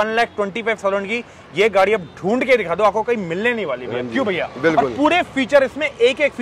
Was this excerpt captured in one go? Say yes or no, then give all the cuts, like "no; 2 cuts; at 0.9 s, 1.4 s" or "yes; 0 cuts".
yes; 0 cuts